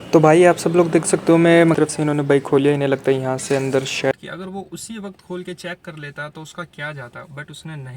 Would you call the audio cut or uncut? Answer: cut